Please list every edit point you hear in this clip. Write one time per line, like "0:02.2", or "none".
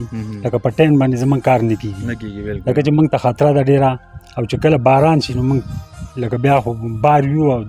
none